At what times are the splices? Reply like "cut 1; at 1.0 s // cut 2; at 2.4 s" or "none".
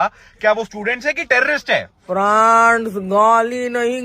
cut 1; at 2.0 s